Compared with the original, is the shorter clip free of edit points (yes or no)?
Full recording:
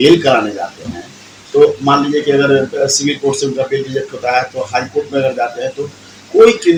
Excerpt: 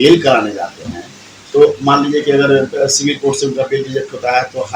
yes